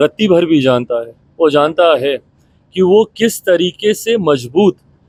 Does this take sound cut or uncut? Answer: uncut